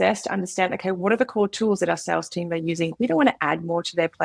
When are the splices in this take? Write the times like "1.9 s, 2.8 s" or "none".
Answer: none